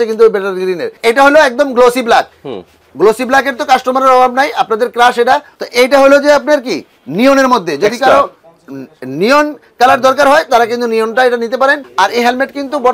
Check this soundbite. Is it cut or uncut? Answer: cut